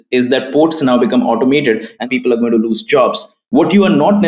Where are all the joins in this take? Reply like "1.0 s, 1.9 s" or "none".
2.0 s, 3.3 s

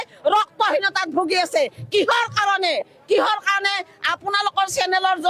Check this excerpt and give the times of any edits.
none

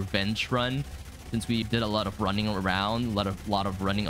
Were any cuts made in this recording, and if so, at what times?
1.6 s

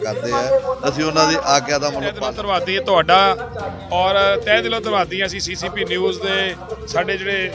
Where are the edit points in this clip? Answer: 2.2 s

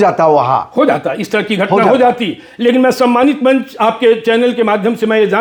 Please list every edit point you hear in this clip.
none

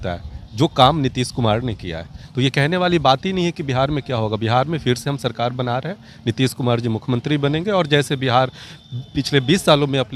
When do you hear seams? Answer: none

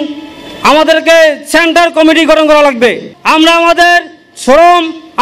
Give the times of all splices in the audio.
3.1 s

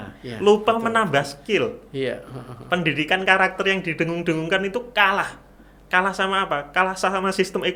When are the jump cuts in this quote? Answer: none

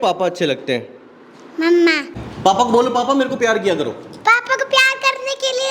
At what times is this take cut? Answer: 2.2 s

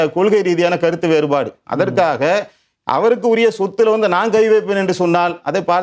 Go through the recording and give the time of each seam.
none

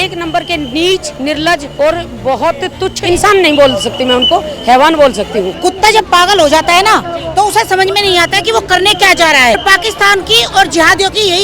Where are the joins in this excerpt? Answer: 1.4 s, 3.0 s, 5.5 s, 9.6 s

